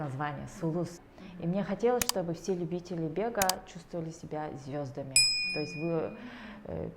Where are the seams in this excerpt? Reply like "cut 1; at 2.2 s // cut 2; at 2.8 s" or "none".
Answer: cut 1; at 1.0 s